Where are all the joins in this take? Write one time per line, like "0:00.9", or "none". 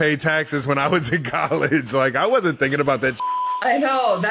0:03.4